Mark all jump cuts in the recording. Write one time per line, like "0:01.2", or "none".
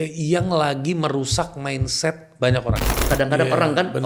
0:03.0

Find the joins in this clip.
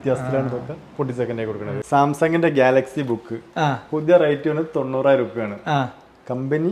0:01.8

